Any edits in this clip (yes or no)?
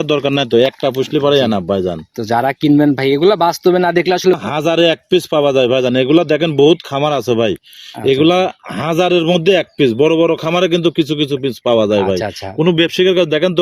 no